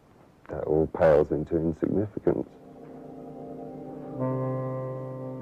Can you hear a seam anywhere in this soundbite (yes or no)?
no